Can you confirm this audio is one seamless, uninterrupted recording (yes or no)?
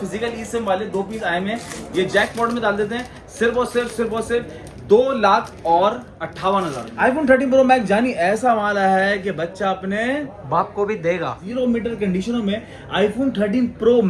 no